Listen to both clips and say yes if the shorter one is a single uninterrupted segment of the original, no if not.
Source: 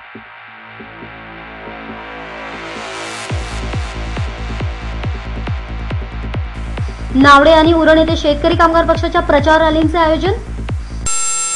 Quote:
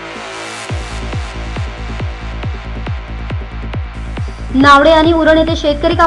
yes